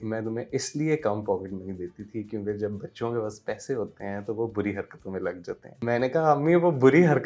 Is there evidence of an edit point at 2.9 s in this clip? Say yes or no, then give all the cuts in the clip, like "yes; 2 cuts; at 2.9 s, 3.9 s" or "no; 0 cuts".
no; 1 cut; at 5.7 s